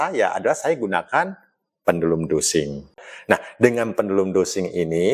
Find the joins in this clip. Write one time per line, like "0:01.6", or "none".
0:03.0